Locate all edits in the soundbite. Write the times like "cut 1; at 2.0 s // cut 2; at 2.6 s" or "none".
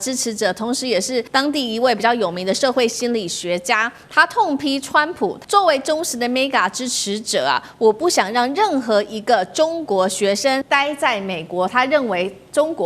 cut 1; at 1.3 s // cut 2; at 5.4 s // cut 3; at 10.6 s